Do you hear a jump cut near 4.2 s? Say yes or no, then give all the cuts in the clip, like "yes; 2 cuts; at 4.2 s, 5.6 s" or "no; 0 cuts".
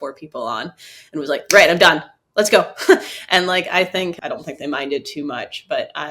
yes; 1 cut; at 4.2 s